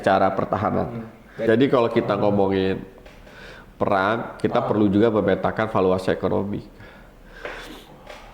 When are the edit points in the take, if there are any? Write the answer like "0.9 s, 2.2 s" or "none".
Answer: 1.5 s

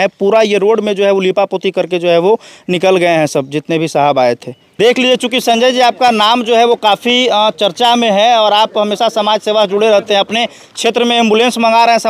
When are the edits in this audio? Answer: 4.6 s

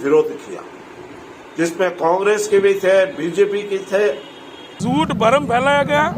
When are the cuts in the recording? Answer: 4.8 s

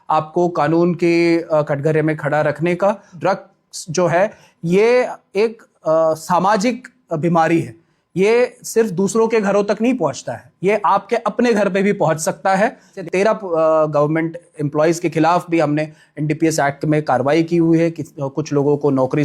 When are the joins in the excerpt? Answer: 3.2 s, 13.0 s

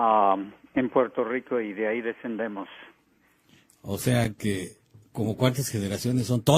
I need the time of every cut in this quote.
2.9 s

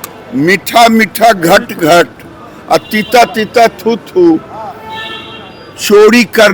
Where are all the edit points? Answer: none

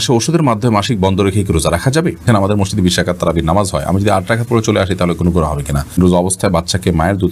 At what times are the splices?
2.3 s, 6.0 s

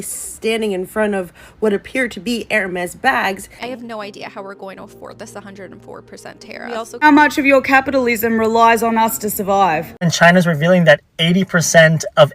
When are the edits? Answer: 3.5 s, 7.0 s, 10.1 s

